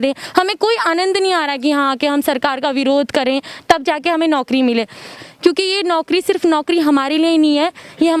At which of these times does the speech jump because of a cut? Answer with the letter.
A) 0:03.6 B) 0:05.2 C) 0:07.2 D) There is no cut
B